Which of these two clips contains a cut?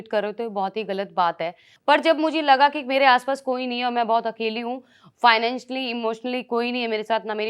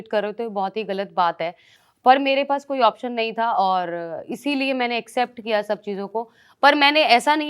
first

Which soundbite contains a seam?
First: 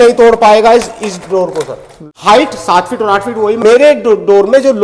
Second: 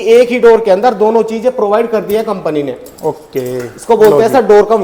first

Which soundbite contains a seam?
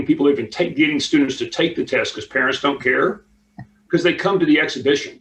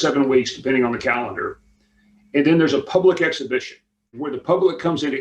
second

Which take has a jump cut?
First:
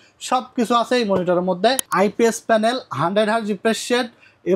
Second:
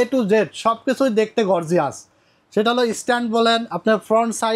first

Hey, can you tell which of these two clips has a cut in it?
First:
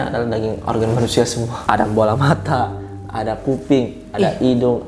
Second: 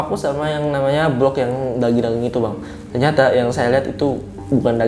first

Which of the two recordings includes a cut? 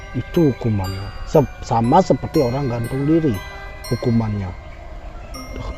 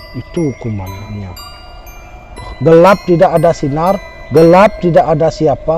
second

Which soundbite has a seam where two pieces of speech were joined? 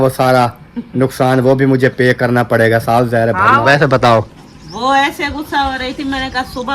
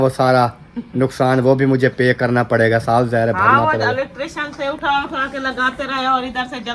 first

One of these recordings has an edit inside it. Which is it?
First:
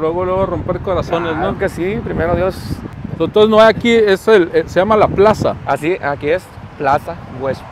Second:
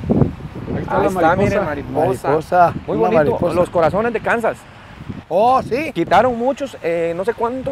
first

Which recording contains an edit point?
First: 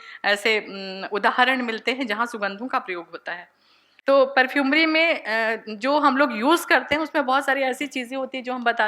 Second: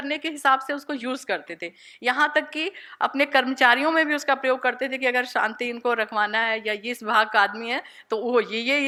first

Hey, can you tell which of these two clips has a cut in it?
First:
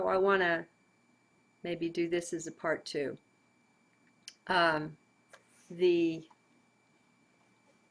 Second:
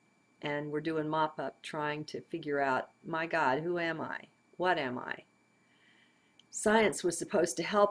first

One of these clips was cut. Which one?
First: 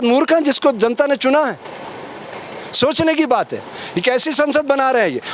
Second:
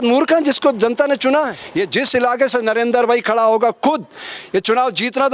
second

